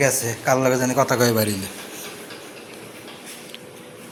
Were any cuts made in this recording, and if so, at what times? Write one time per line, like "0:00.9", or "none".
none